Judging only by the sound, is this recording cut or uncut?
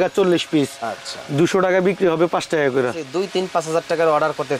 cut